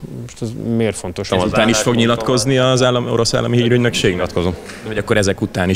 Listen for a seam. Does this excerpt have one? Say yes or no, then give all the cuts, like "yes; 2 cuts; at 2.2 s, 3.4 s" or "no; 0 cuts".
yes; 1 cut; at 1.3 s